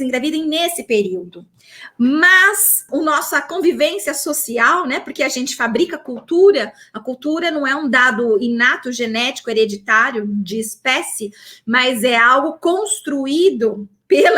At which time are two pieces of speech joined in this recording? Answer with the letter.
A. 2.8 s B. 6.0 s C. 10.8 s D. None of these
A